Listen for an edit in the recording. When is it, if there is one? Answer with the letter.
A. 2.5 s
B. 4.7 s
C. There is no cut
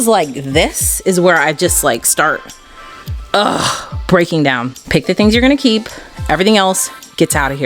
B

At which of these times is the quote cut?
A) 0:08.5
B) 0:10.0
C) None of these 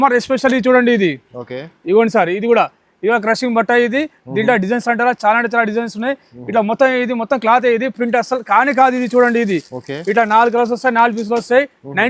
C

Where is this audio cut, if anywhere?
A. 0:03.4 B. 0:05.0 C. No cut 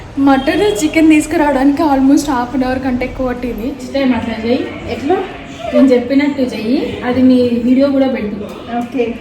A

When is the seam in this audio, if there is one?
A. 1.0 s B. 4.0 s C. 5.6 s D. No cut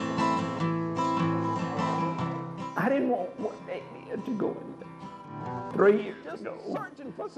C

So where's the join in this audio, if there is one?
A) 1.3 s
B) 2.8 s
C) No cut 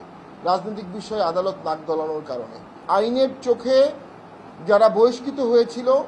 B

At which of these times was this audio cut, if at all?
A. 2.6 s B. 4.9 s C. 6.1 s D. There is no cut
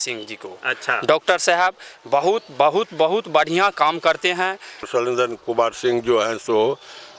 B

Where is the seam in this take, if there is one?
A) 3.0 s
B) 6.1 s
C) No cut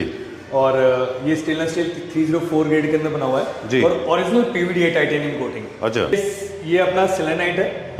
B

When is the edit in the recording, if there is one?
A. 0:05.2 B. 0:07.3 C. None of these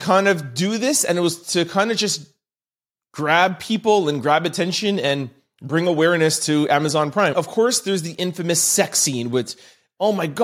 B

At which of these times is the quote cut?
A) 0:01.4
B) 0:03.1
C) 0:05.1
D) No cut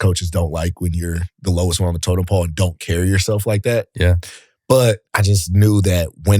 C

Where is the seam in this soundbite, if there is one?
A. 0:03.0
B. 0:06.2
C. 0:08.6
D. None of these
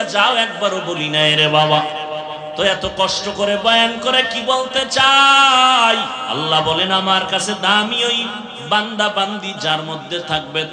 B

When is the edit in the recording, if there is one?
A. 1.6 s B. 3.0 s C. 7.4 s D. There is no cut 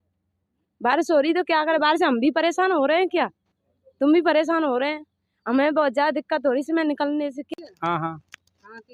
C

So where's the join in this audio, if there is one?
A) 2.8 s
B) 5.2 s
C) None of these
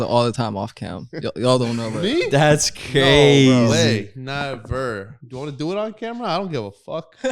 B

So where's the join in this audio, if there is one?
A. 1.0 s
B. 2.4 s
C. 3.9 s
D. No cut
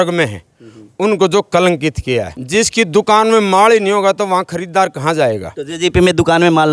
B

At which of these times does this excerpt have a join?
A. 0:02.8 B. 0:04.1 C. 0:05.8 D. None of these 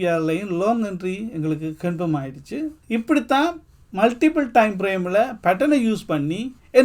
A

